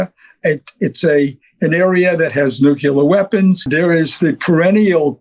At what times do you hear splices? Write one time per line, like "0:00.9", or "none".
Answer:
0:03.7